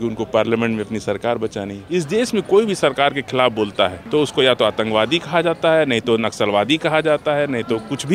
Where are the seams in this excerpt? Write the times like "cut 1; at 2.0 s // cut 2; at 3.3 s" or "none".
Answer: cut 1; at 1.8 s // cut 2; at 4.0 s

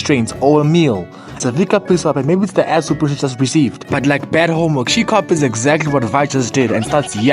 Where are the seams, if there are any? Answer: cut 1; at 1.3 s

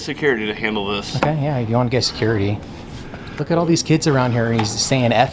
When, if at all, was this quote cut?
cut 1; at 3.4 s

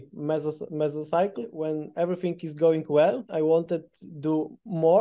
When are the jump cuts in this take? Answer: cut 1; at 1.5 s // cut 2; at 3.2 s

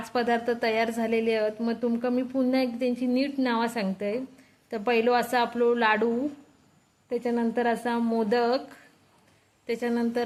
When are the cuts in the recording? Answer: none

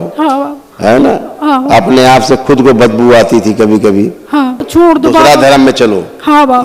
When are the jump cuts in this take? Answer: cut 1; at 4.6 s

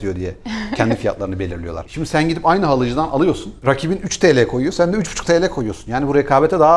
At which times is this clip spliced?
cut 1; at 1.8 s // cut 2; at 3.5 s

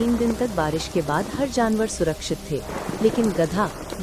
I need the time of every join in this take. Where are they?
none

